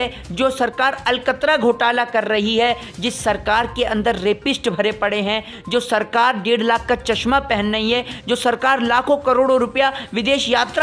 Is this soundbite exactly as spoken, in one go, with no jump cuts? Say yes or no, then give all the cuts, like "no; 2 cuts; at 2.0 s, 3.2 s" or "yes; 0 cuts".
yes; 0 cuts